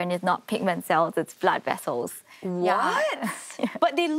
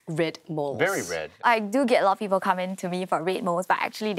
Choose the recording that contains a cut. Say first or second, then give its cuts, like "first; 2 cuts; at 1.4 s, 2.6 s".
second; 1 cut; at 1.4 s